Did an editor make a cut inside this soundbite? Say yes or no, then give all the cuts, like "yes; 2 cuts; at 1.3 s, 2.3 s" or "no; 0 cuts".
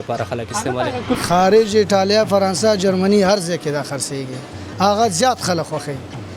yes; 1 cut; at 1.2 s